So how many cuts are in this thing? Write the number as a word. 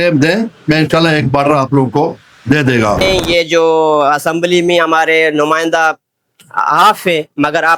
one